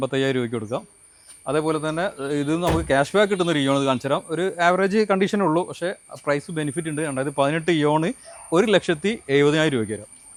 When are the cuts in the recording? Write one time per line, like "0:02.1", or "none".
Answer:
none